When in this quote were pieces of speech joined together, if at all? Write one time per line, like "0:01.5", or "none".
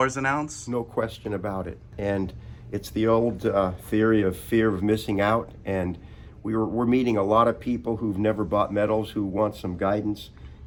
none